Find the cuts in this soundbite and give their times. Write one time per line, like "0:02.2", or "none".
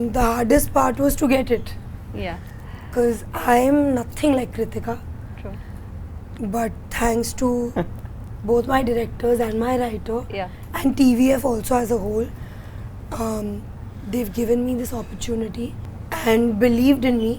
none